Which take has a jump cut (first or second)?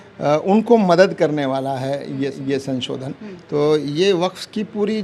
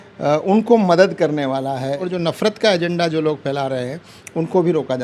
second